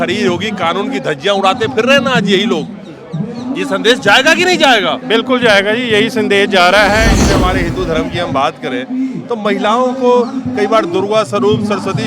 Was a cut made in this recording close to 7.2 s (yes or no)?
yes